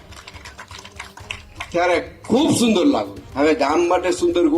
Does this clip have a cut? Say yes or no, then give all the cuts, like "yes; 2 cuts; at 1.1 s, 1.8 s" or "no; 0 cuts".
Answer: yes; 1 cut; at 3.2 s